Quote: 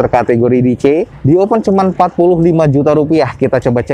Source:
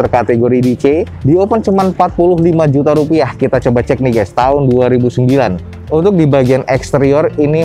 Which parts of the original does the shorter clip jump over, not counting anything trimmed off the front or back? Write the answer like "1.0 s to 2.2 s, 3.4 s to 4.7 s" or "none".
none